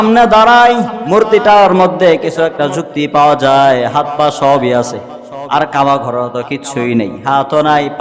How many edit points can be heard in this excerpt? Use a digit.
1